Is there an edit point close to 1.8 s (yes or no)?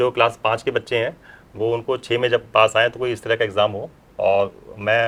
no